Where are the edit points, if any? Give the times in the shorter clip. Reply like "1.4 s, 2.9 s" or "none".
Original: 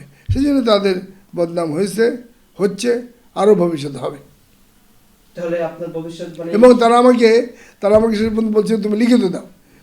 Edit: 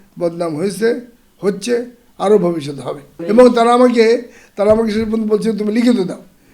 3.1 s